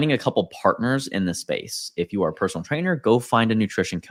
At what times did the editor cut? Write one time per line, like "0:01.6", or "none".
none